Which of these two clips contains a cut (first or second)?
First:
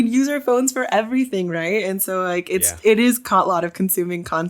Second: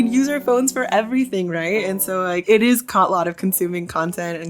second